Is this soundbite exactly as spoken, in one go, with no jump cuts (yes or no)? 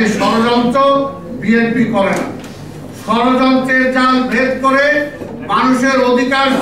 yes